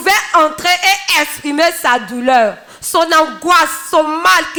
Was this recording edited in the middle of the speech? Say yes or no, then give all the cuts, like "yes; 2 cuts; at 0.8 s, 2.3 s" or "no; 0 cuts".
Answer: no; 0 cuts